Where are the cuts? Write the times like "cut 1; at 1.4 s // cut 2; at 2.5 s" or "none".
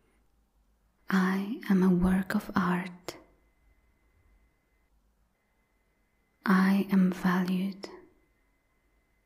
cut 1; at 0.9 s

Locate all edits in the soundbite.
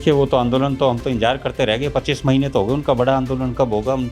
none

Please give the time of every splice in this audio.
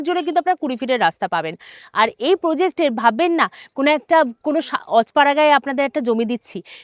none

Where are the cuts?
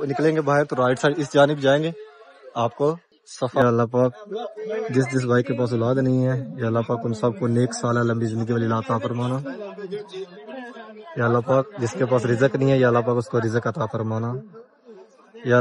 cut 1; at 3.6 s

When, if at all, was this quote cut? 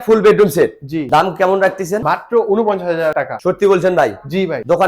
none

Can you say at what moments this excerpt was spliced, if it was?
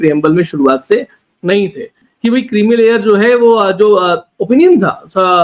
cut 1; at 2.1 s

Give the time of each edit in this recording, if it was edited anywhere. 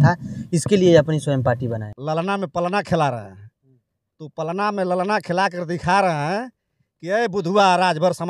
cut 1; at 1.6 s

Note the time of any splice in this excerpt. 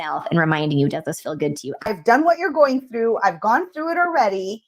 cut 1; at 2.0 s

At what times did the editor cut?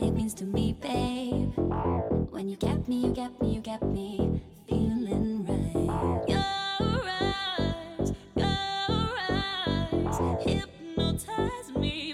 none

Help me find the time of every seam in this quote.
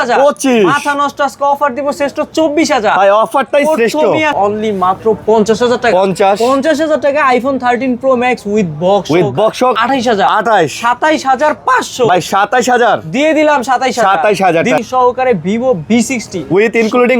cut 1; at 4.3 s // cut 2; at 9.8 s // cut 3; at 14.8 s

